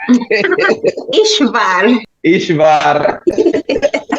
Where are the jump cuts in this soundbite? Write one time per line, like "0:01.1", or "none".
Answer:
0:02.1